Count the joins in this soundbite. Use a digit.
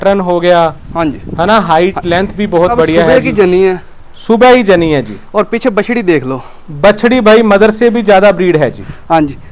1